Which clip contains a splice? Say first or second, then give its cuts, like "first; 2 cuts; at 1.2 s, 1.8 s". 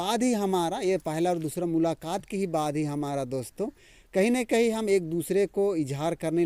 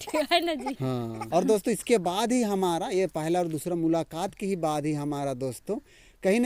second; 1 cut; at 1.2 s